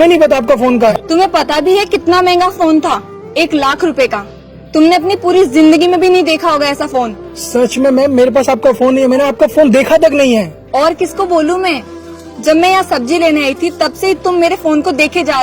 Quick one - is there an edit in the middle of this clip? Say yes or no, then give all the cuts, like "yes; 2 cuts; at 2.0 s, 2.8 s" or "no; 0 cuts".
yes; 1 cut; at 1.0 s